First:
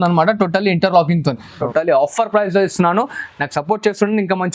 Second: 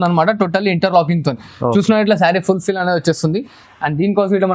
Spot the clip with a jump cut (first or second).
first